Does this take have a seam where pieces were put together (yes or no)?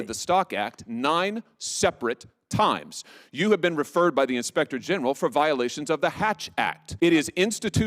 yes